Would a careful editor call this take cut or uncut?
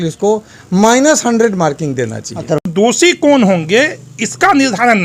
cut